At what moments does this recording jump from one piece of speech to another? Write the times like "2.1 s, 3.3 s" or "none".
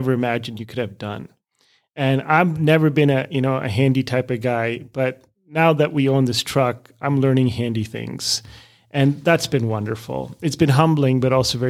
none